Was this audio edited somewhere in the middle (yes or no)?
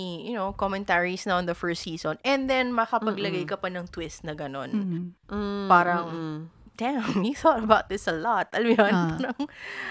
no